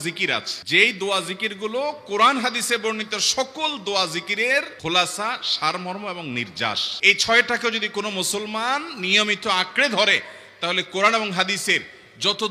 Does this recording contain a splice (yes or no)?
no